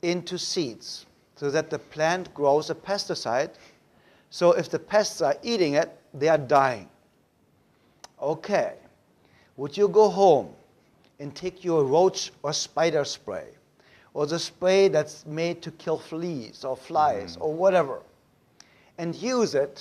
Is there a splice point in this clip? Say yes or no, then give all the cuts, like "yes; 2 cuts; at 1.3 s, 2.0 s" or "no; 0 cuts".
no; 0 cuts